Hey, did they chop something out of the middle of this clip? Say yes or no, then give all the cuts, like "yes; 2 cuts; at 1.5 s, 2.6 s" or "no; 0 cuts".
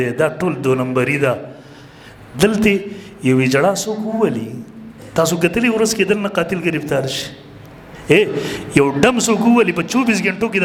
no; 0 cuts